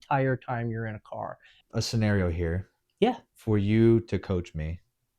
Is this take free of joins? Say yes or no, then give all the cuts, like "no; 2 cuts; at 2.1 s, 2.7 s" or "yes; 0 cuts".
no; 1 cut; at 1.5 s